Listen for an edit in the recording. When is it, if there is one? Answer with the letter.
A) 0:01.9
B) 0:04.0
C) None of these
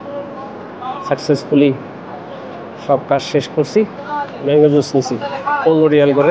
B